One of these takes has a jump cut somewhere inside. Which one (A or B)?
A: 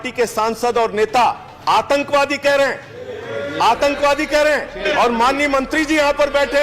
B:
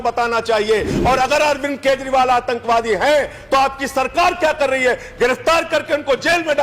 A